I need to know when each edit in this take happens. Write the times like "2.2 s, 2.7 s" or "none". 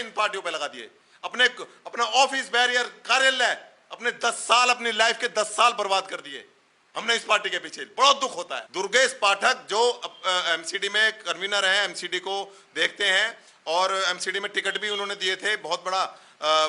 8.6 s